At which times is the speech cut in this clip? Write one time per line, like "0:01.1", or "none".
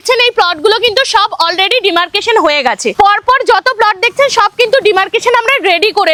none